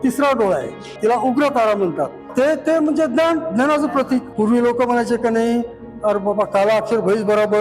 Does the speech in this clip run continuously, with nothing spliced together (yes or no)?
no